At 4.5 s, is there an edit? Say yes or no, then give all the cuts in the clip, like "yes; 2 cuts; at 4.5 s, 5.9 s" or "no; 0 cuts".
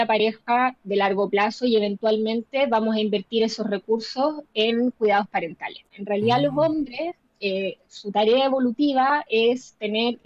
no; 1 cut; at 5.9 s